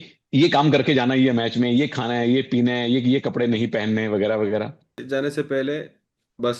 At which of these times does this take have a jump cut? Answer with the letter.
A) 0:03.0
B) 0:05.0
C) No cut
B